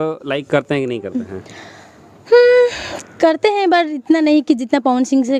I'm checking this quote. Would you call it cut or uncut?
uncut